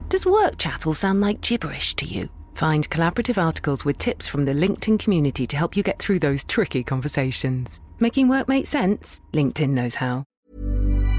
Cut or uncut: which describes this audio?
cut